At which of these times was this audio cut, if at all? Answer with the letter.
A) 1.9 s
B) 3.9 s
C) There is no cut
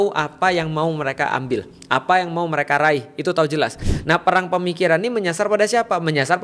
B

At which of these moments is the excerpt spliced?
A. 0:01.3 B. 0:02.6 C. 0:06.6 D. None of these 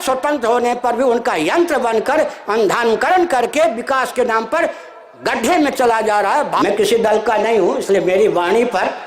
C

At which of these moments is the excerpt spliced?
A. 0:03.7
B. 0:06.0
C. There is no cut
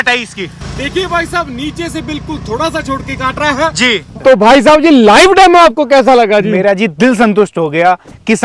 C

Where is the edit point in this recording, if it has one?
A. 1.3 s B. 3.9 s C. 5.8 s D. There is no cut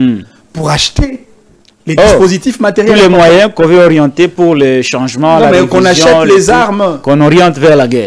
D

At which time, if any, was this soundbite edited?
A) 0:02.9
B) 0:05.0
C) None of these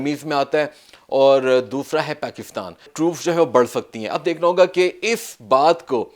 A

